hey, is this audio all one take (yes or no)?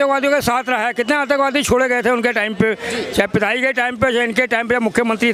yes